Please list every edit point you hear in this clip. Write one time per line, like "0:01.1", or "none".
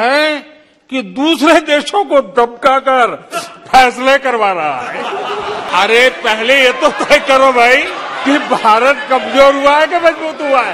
0:05.6
0:08.2